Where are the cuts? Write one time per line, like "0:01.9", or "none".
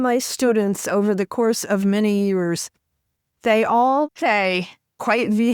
0:04.1